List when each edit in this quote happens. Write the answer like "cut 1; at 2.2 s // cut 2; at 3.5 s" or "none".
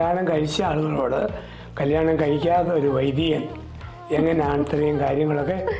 none